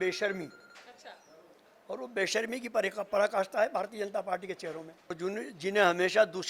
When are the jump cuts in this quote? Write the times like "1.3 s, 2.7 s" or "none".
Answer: 5.2 s

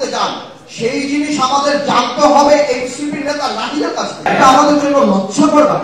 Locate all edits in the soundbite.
4.3 s

